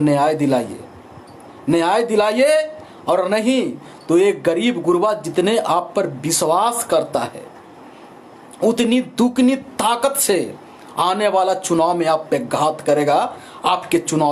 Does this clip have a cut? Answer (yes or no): no